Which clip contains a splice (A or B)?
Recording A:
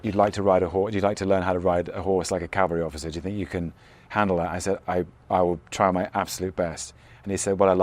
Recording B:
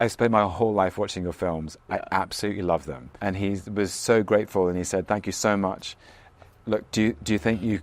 B